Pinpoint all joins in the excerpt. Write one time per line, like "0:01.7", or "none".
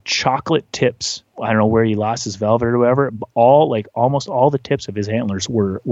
0:01.3